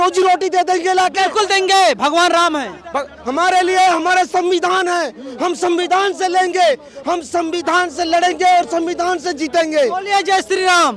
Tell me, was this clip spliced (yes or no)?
no